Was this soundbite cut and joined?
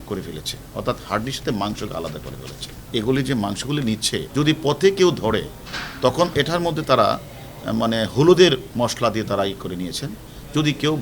yes; 3 cuts; at 2.7 s, 4.3 s, 8.7 s

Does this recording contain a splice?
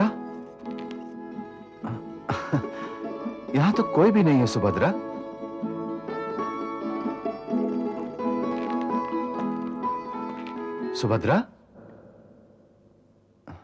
no; 0 cuts

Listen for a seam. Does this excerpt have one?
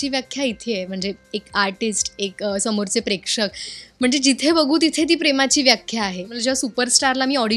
yes; 1 cut; at 6.3 s

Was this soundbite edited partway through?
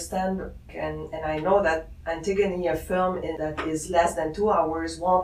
yes; 1 cut; at 3.3 s

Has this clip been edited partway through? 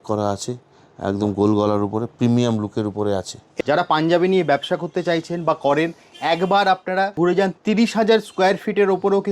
yes; 2 cuts; at 3.4 s, 7.1 s

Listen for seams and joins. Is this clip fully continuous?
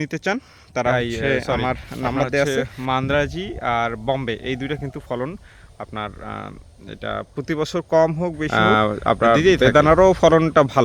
no; 2 cuts; at 2.5 s, 8.5 s

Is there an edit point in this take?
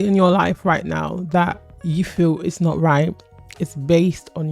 no; 0 cuts

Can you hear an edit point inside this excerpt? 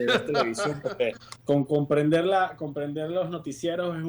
yes; 1 cut; at 1.3 s

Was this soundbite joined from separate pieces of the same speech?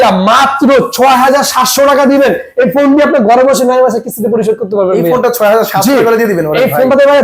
no; 0 cuts

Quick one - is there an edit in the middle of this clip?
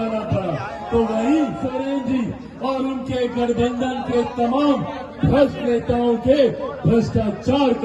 yes; 1 cut; at 1.7 s

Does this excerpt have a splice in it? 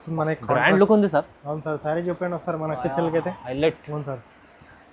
no; 0 cuts

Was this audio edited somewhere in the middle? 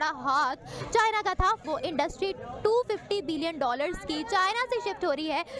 no; 0 cuts

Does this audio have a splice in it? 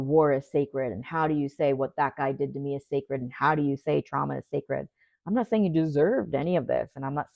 no; 0 cuts

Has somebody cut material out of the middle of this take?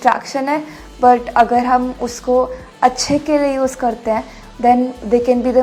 no; 0 cuts

